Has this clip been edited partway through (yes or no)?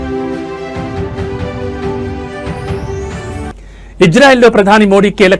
yes